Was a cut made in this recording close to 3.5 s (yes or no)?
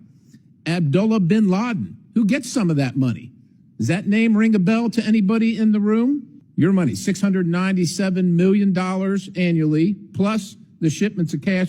no